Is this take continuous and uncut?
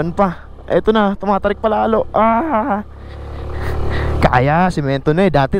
yes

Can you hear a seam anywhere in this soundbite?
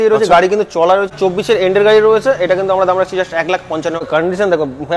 yes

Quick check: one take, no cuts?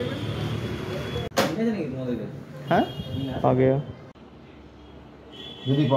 no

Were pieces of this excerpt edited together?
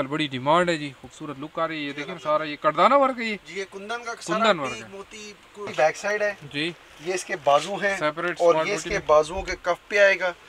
yes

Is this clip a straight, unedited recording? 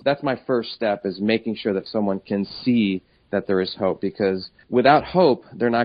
yes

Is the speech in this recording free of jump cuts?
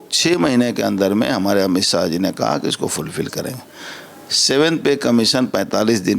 yes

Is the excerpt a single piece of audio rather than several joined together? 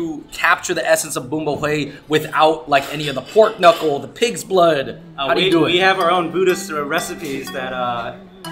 yes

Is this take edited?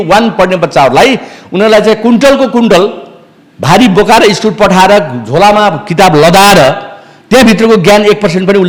no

